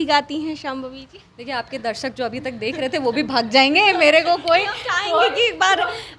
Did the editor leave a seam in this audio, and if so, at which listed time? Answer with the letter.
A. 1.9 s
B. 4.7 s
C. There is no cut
C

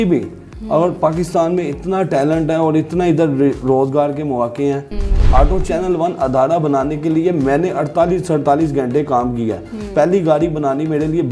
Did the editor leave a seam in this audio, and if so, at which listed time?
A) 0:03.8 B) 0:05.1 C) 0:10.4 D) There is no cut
B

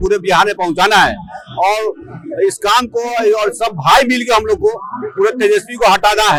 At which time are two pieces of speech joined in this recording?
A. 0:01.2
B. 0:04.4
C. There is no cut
C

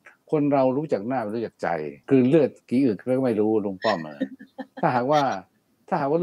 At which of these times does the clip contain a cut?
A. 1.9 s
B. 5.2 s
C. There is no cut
A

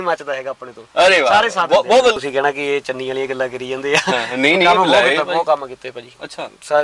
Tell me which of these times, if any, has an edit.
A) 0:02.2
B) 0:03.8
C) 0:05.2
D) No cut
A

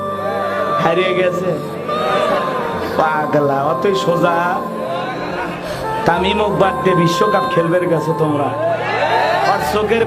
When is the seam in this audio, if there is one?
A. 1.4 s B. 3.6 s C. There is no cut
C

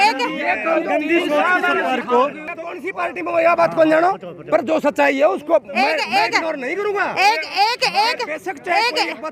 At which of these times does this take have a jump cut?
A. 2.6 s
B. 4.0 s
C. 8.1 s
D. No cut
A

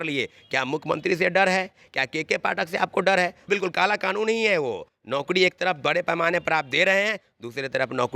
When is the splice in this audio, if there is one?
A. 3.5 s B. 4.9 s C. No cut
A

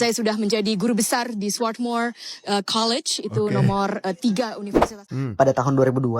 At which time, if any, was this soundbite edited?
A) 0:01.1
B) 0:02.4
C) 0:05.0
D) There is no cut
C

